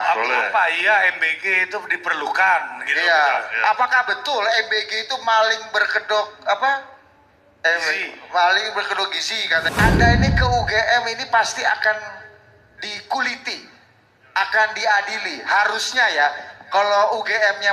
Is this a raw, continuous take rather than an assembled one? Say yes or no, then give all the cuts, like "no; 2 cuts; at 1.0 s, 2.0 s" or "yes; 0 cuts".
no; 1 cut; at 9.7 s